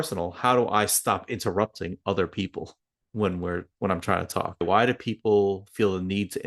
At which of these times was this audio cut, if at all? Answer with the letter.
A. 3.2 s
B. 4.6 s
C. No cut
B